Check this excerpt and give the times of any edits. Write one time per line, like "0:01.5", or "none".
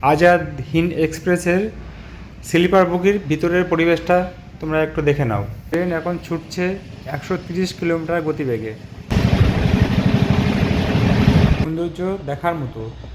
0:05.7
0:11.6